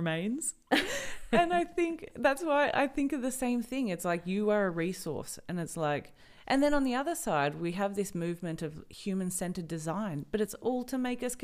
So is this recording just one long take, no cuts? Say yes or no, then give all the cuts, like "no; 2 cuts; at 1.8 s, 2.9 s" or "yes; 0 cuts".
yes; 0 cuts